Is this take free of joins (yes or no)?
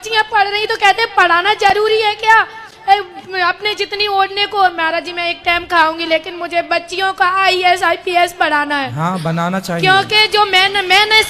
yes